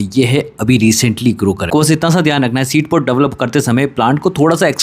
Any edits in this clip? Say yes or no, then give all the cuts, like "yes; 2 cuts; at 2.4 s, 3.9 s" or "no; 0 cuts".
yes; 1 cut; at 1.7 s